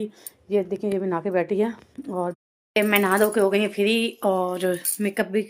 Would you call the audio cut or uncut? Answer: cut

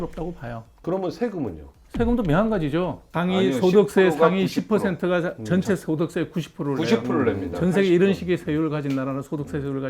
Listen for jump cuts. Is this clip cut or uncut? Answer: cut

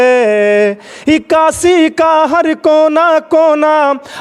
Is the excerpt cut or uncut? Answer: uncut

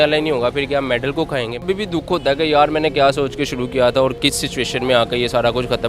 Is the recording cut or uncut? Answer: cut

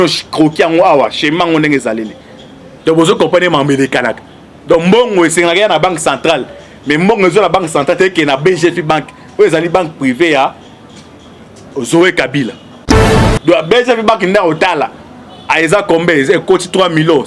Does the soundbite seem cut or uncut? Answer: cut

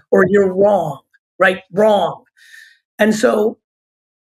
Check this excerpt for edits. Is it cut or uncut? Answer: uncut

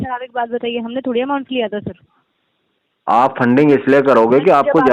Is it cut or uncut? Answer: uncut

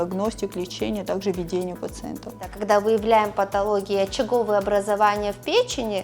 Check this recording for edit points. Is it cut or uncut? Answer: cut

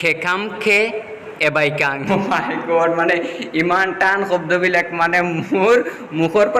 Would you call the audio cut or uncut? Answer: cut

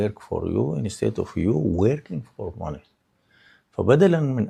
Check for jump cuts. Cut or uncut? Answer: uncut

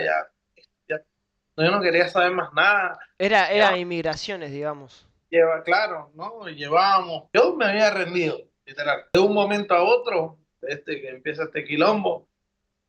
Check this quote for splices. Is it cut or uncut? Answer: cut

